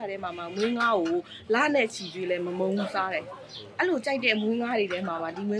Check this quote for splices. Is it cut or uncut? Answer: uncut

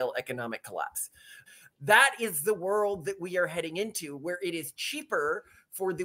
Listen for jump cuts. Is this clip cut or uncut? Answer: cut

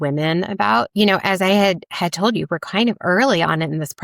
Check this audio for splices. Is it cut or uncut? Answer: cut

